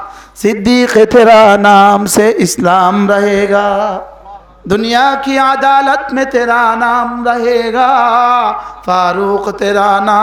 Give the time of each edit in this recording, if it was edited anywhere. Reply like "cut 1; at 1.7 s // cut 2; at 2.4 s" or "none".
none

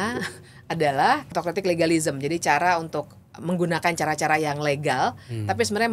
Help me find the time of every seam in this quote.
cut 1; at 1.2 s

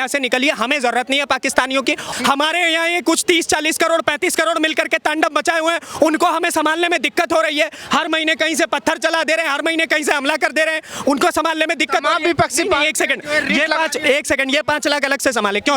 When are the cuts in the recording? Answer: cut 1; at 2.1 s

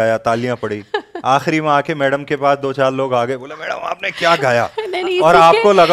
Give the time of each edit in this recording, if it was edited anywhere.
none

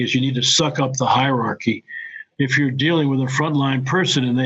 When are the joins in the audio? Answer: cut 1; at 2.2 s

